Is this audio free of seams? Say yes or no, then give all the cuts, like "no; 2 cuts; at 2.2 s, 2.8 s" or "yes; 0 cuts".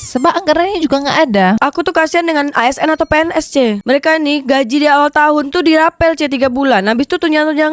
no; 2 cuts; at 1.6 s, 3.8 s